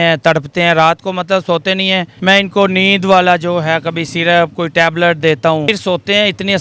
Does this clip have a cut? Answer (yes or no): yes